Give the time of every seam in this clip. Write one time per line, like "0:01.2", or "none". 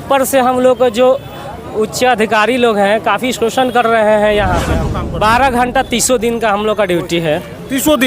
0:04.8